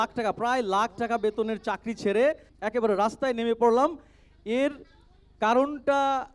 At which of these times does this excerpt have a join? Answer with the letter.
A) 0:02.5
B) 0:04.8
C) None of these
A